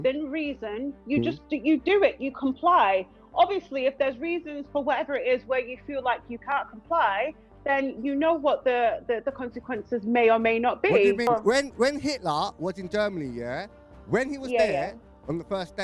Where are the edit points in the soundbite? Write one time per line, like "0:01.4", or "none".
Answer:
0:11.3